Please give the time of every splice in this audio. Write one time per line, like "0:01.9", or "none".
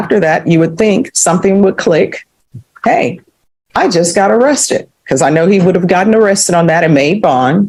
none